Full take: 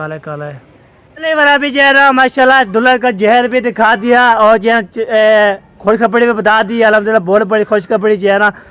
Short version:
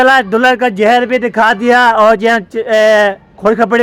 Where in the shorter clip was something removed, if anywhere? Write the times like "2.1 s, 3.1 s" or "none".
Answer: none